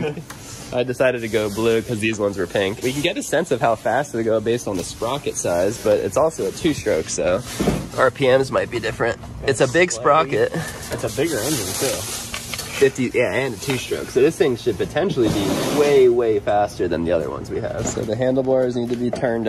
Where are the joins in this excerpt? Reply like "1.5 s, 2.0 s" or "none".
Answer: none